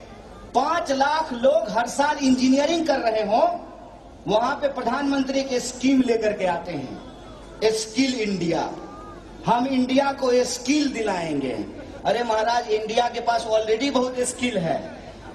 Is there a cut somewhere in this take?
no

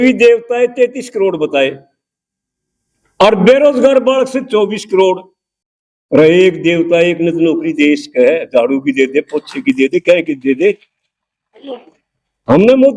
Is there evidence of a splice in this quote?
no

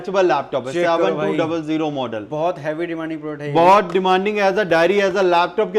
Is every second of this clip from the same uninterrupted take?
yes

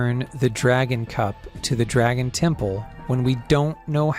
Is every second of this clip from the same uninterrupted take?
yes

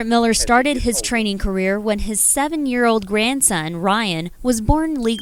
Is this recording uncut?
yes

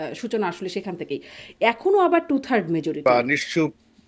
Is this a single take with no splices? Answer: no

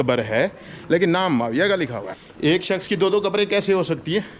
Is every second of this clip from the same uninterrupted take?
no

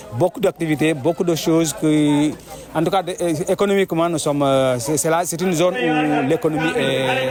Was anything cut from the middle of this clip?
no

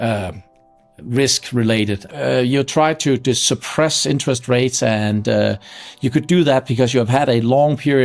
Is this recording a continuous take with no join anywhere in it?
no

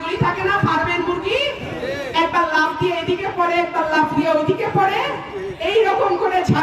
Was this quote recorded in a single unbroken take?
yes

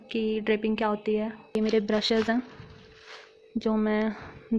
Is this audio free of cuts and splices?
no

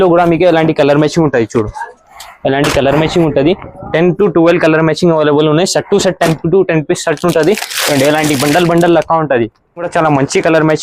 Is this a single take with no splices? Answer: no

